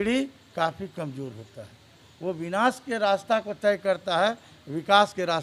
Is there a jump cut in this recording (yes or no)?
no